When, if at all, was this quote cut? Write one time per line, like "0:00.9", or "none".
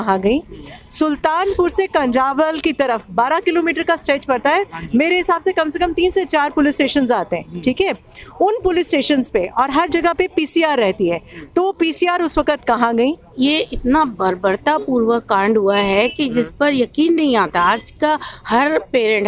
0:13.3